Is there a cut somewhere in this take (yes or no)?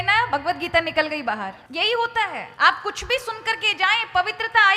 yes